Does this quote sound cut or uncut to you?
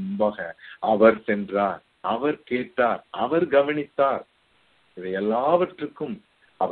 uncut